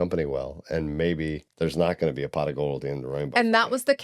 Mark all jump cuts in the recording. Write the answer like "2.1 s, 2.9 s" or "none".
1.4 s

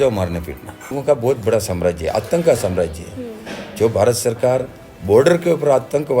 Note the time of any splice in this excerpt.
0.9 s

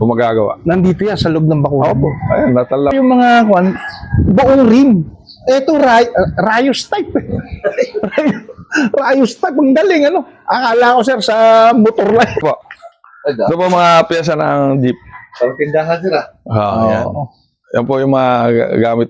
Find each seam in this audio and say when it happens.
2.9 s, 12.4 s

